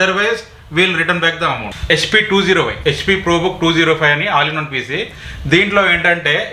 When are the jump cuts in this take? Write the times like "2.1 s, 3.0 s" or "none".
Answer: 1.7 s, 2.7 s